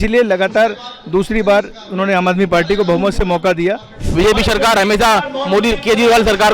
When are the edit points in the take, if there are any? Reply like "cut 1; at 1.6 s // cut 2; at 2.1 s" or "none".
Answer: cut 1; at 4.1 s